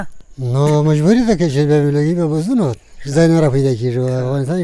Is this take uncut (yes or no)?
yes